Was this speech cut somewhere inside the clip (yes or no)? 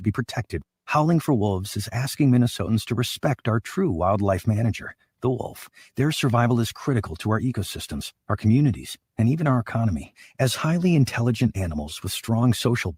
no